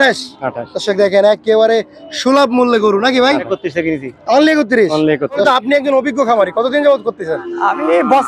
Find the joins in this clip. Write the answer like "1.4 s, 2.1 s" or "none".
3.6 s, 5.4 s